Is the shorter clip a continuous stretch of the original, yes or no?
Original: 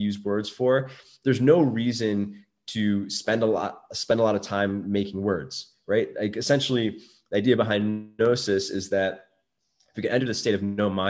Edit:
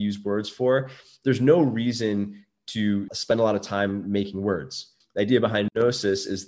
no